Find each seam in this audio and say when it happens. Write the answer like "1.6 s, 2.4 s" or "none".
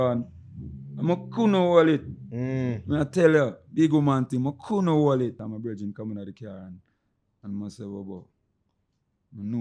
5.5 s